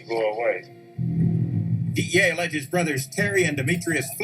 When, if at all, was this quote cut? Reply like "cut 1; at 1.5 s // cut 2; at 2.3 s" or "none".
cut 1; at 2.7 s